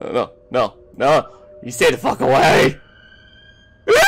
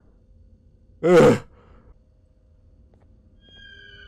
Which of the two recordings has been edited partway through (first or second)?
second